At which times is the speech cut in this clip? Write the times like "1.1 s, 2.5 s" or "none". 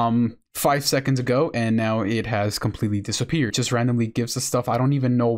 3.5 s